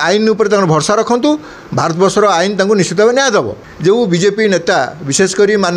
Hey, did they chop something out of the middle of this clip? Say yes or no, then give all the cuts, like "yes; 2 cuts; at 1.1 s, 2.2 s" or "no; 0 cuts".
yes; 1 cut; at 3.6 s